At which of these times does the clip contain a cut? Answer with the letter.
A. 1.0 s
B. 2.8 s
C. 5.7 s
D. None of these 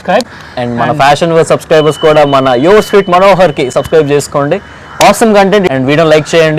C